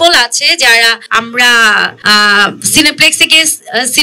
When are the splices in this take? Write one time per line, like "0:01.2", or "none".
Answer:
0:01.0
0:02.0

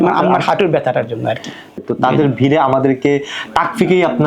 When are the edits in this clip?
0:01.8

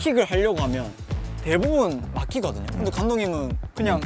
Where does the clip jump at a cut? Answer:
0:02.7

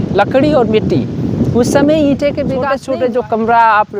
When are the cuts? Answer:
0:02.7

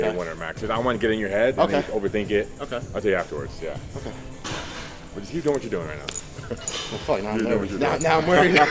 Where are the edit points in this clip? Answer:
none

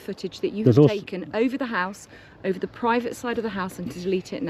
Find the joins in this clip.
none

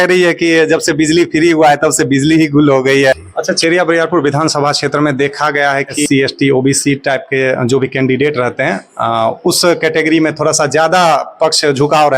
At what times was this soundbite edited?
0:03.1
0:06.0

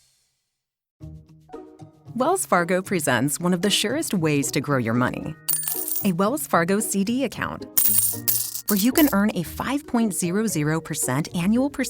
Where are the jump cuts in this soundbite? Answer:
0:00.9

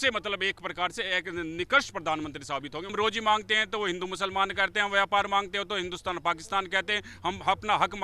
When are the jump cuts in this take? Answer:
0:02.9

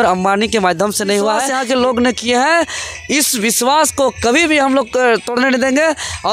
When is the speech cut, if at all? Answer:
0:01.5

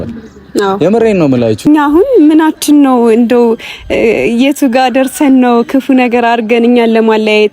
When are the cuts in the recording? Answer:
0:01.7

